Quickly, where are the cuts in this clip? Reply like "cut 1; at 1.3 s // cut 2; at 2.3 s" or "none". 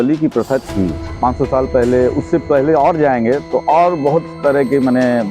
cut 1; at 1.0 s